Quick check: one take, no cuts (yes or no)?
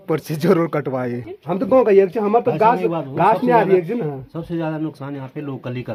yes